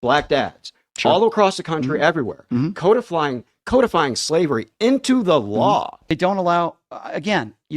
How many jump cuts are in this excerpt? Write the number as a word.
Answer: one